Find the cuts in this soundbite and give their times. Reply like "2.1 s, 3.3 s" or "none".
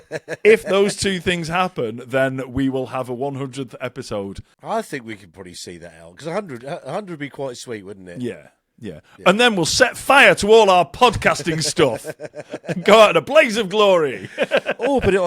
4.6 s